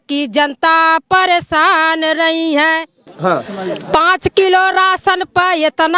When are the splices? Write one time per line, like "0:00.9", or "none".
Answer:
none

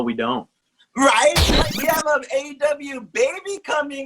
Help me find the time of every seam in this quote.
0:01.5

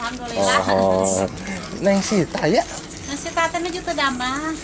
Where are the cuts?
none

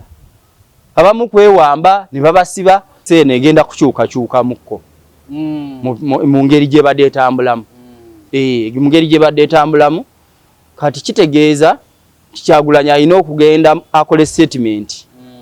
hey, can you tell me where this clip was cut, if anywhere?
0:03.0

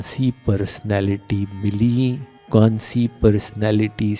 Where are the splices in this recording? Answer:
0:02.3

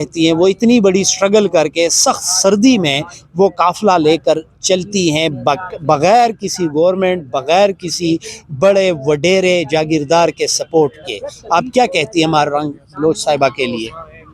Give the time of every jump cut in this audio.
none

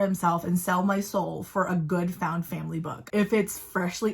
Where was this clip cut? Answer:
0:03.0

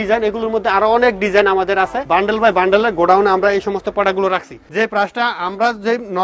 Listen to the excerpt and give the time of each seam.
0:02.0
0:04.6

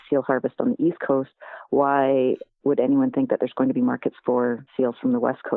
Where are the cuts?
0:04.6

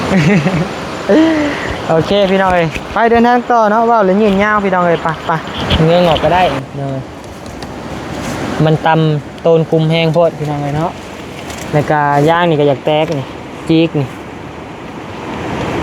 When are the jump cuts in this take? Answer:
0:05.7

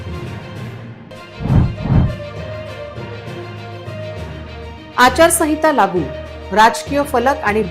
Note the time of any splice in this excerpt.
0:01.0

